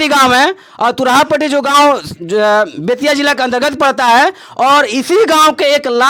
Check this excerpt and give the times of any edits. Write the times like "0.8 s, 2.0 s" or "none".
none